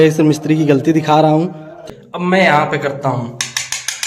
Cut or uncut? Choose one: cut